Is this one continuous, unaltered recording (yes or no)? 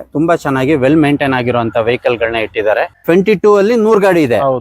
no